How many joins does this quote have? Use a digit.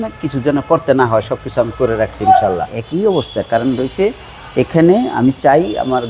1